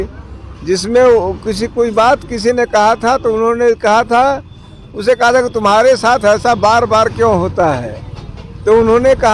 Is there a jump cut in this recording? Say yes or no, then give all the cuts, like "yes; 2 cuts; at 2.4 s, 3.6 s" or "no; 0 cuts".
no; 0 cuts